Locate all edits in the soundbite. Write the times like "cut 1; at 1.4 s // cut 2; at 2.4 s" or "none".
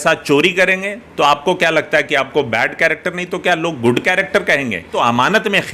cut 1; at 4.8 s